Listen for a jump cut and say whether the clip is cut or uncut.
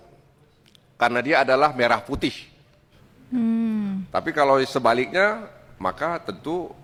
uncut